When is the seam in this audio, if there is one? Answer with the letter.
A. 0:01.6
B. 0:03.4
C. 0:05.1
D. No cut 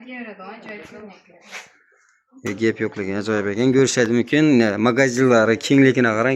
D